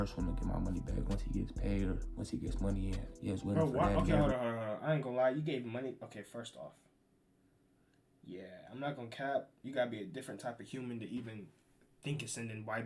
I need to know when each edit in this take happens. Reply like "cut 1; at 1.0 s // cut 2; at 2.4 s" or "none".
none